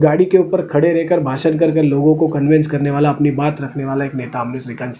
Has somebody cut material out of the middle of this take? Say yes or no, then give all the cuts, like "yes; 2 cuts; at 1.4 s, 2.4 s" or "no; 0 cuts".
no; 0 cuts